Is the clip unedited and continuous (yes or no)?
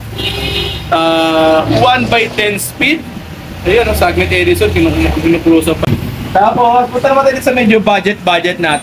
no